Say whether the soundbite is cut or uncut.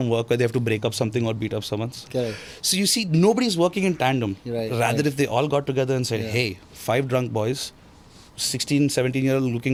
uncut